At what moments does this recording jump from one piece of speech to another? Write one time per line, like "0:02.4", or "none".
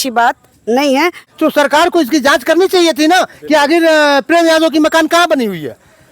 0:01.3